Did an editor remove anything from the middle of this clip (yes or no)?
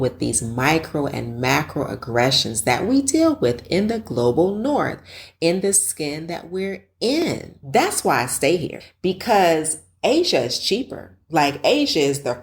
yes